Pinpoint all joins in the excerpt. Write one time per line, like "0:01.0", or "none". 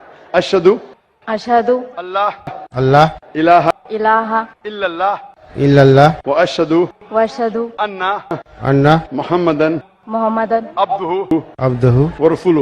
0:01.0
0:02.6
0:03.7
0:05.4
0:07.0
0:08.4
0:09.9
0:11.3